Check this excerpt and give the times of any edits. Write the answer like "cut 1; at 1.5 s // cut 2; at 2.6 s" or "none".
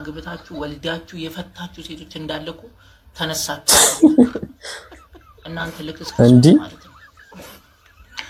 none